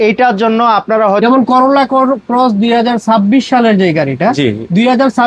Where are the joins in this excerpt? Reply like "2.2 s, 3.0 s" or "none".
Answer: 1.2 s